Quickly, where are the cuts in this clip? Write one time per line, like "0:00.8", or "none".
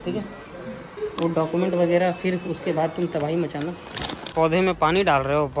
0:04.3